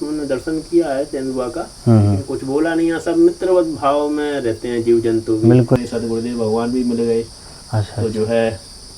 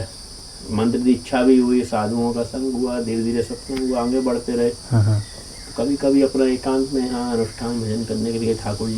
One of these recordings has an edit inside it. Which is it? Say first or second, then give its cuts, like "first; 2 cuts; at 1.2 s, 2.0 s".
first; 1 cut; at 5.8 s